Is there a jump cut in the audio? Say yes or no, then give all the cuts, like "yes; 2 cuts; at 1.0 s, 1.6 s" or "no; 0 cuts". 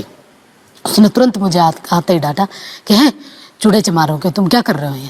no; 0 cuts